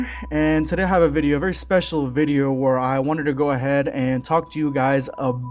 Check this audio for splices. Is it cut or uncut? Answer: uncut